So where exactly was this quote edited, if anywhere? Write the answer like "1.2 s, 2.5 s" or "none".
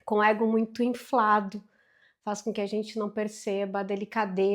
none